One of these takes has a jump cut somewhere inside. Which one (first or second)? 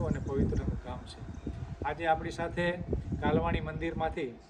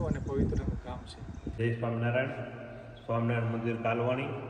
second